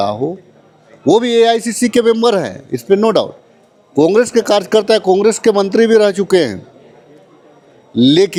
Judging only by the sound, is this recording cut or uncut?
uncut